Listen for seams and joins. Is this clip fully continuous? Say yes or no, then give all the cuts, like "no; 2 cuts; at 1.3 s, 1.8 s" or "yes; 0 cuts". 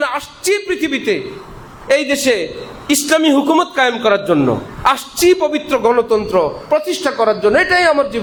yes; 0 cuts